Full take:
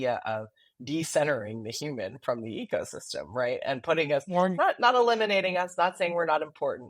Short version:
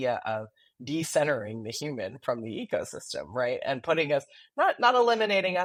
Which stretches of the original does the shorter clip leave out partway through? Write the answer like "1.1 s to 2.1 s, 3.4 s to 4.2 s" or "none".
none